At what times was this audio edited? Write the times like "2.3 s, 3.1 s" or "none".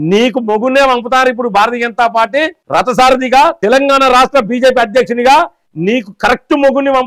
none

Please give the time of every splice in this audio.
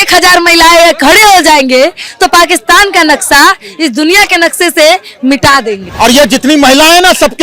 5.8 s

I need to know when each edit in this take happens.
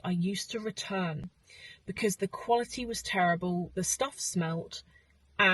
none

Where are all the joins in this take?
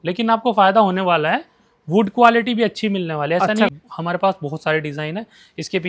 3.7 s

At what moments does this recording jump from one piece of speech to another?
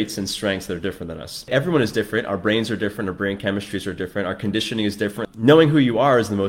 1.5 s, 5.2 s

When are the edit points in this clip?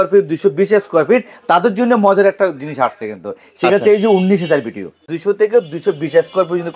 5.1 s

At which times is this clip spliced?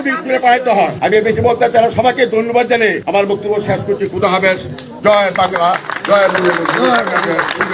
1.0 s, 3.0 s

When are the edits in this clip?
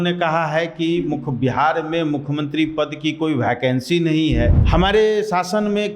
4.6 s

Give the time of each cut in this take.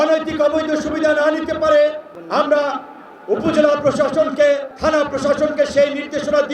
2.1 s, 4.7 s

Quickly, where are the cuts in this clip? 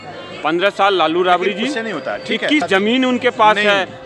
2.7 s

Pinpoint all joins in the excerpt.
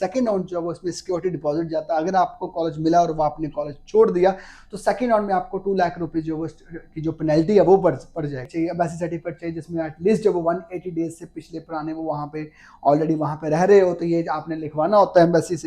8.5 s

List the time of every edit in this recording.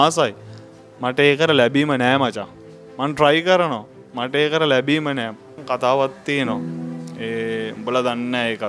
5.5 s

